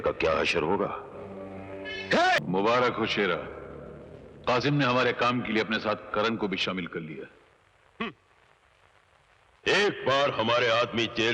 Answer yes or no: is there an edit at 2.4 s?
yes